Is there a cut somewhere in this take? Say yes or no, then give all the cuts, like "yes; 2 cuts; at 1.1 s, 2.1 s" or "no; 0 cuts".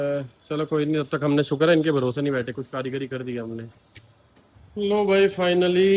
no; 0 cuts